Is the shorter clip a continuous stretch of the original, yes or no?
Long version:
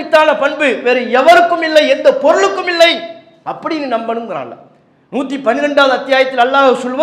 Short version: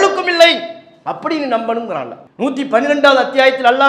no